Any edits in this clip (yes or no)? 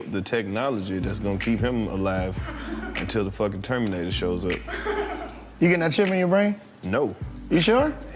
yes